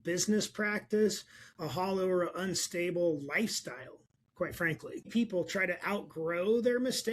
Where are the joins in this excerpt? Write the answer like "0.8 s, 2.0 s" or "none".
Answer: 5.1 s

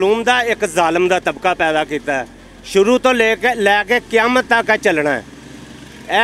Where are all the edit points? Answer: none

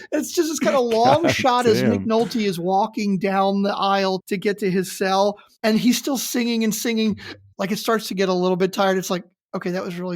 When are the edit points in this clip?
4.2 s, 5.5 s, 7.4 s

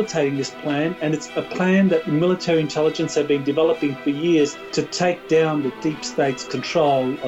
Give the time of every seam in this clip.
1.3 s, 2.1 s, 4.6 s

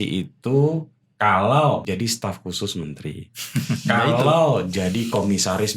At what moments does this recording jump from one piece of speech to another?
1.8 s

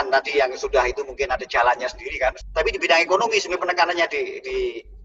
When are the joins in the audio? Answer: 2.4 s

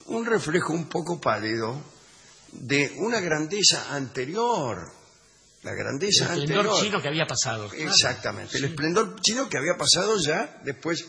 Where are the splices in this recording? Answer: none

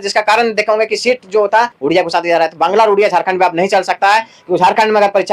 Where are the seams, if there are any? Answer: 1.8 s

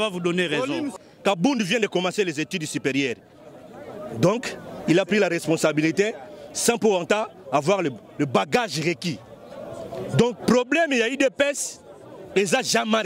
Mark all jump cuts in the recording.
0.9 s

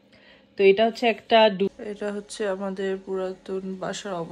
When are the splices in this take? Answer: 1.7 s

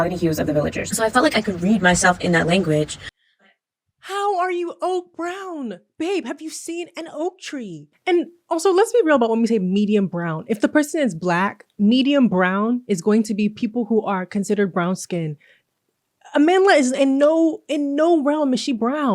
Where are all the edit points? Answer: 7.9 s

